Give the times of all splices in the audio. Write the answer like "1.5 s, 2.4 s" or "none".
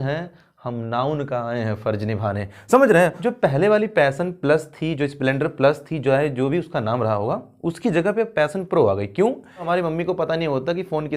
3.2 s, 9.7 s

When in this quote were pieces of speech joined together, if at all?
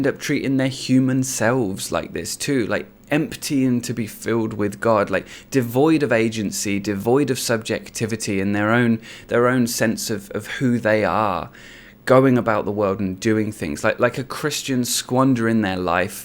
none

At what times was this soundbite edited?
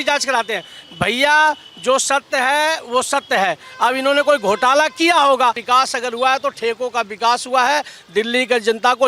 5.6 s

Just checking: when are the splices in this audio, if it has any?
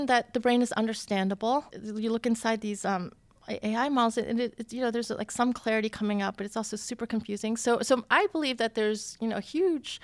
1.8 s

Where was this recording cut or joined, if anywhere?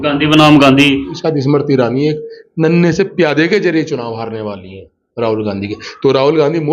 1.2 s

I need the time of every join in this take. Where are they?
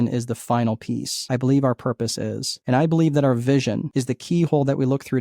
1.1 s, 2.5 s, 3.8 s

